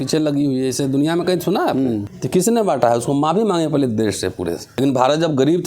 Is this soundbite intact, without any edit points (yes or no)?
no